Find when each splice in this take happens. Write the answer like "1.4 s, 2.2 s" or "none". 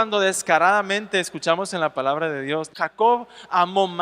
2.7 s